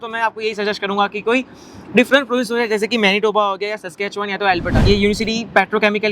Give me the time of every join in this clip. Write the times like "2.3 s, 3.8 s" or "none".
4.8 s

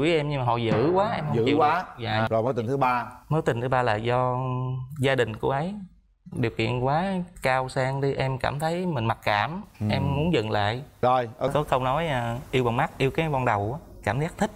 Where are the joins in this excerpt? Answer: 11.5 s

